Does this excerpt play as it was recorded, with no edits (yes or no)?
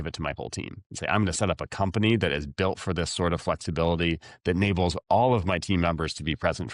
yes